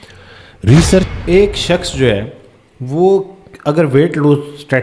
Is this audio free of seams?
no; 1 cut; at 1.1 s

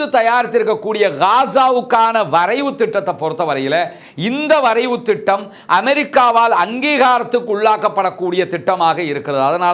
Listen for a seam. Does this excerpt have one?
no; 0 cuts

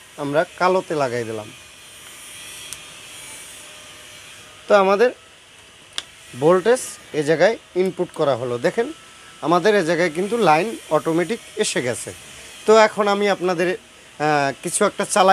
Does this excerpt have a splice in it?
no; 0 cuts

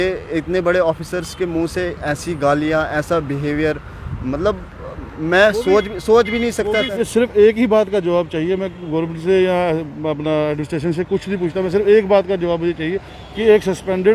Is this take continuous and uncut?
no; 1 cut; at 7.0 s

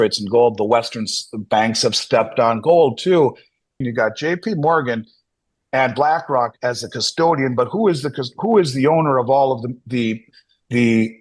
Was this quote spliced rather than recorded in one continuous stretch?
yes; 1 cut; at 3.8 s

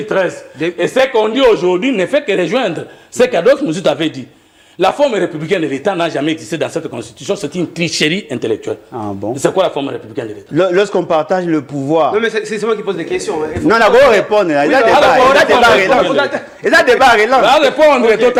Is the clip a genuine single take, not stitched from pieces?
yes; 0 cuts

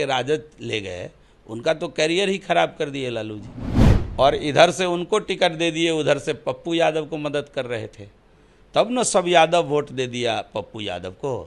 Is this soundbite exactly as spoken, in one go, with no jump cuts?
yes; 0 cuts

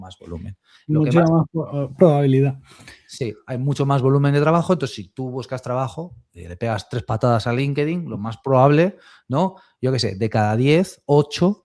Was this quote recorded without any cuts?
yes; 0 cuts

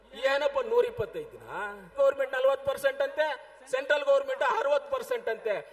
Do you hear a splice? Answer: yes; 1 cut; at 1.9 s

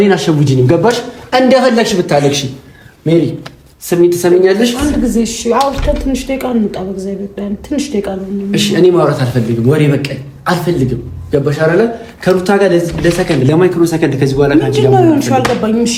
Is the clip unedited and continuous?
yes; 0 cuts

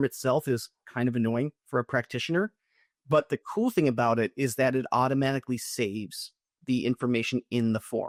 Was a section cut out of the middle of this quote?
no; 0 cuts

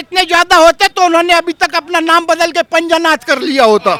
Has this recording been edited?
no; 0 cuts

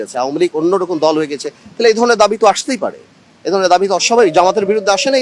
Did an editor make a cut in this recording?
no; 0 cuts

